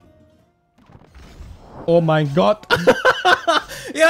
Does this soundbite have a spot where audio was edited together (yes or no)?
yes